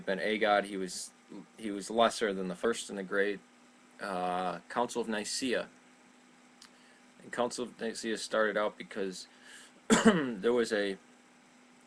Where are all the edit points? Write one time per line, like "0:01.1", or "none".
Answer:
none